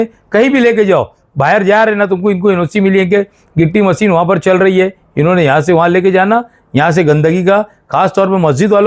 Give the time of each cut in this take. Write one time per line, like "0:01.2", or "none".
none